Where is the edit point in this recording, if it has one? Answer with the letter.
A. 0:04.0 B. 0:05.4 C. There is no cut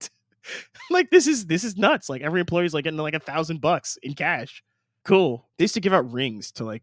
B